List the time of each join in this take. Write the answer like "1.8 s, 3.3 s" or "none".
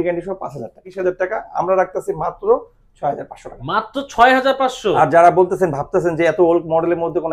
0.9 s